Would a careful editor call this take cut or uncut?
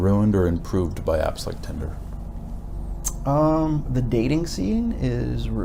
uncut